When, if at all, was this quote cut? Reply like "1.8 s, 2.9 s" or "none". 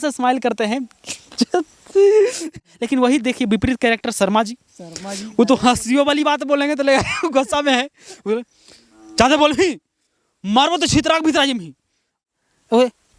2.4 s, 12.2 s